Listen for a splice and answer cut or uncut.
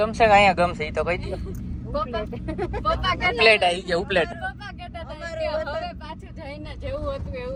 uncut